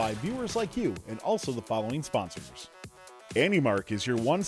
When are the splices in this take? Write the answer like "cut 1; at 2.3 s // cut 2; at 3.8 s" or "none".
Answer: cut 1; at 2.8 s

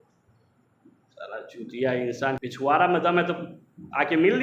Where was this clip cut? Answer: cut 1; at 2.4 s

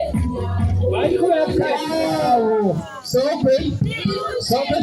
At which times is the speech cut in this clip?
cut 1; at 1.7 s

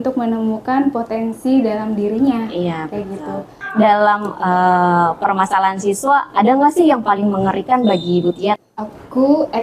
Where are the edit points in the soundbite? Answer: cut 1; at 3.6 s // cut 2; at 8.6 s

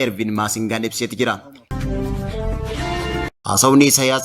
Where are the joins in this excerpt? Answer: cut 1; at 1.7 s // cut 2; at 3.3 s

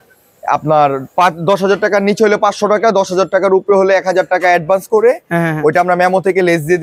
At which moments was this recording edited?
none

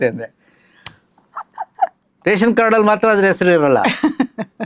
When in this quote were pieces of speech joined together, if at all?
cut 1; at 2.0 s

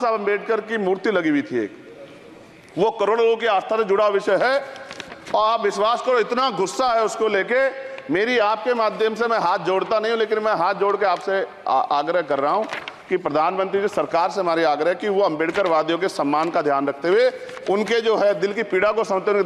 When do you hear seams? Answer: none

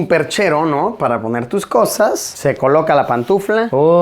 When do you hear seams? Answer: cut 1; at 2.3 s

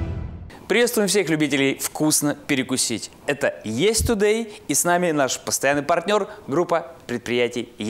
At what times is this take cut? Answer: none

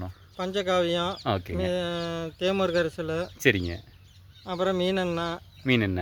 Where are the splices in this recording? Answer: none

